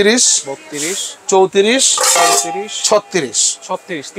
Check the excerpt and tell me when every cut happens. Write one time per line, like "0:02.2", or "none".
none